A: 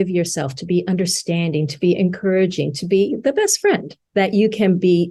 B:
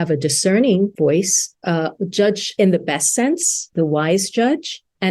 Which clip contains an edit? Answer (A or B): B